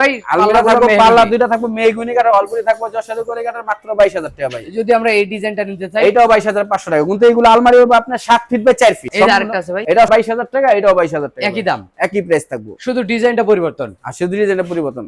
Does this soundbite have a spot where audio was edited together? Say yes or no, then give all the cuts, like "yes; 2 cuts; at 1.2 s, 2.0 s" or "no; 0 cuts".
no; 0 cuts